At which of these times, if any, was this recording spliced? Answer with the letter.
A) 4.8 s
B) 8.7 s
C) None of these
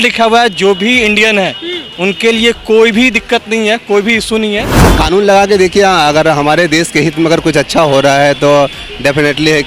A